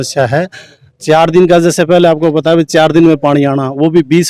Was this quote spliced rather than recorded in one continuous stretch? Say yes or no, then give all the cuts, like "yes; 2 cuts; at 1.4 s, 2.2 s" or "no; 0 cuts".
no; 0 cuts